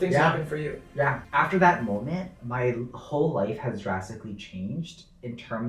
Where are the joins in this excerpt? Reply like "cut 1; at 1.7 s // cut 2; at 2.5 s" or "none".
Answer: cut 1; at 1.2 s